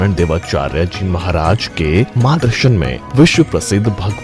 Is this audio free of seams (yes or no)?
no